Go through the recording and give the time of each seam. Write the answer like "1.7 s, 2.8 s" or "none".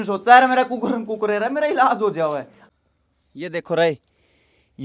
2.5 s